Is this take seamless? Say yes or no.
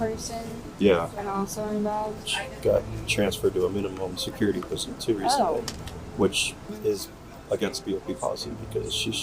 yes